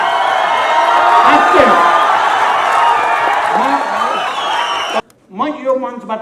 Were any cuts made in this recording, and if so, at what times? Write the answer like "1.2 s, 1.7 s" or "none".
5.0 s